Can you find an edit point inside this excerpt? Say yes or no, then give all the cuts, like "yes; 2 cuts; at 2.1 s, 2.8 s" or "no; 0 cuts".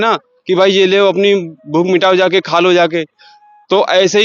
no; 0 cuts